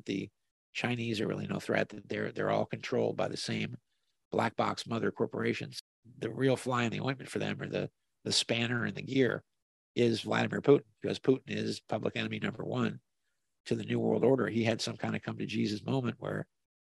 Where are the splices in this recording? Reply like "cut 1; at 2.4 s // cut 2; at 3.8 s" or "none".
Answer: cut 1; at 5.7 s